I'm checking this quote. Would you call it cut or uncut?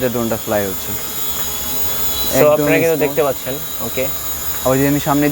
uncut